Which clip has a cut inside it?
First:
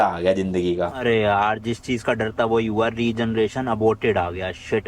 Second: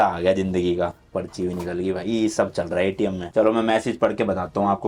first; 1 cut; at 0.9 s

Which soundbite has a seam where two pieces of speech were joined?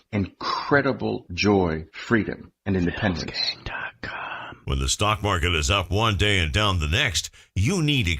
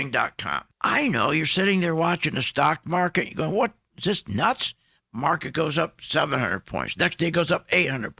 first; 1 cut; at 4.6 s

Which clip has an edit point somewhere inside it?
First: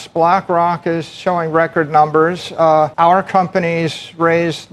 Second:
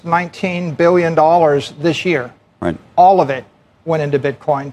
first; 1 cut; at 2.9 s

